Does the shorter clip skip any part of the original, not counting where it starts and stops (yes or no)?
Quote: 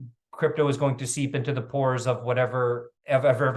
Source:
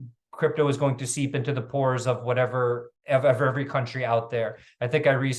no